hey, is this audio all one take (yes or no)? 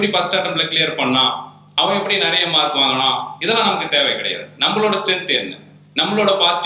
yes